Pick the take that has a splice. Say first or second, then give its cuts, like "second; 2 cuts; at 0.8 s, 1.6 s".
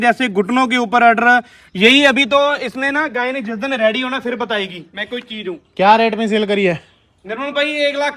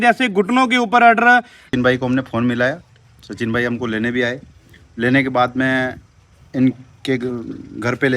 second; 1 cut; at 1.6 s